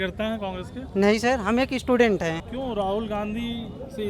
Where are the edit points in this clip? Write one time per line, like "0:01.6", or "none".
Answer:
0:02.5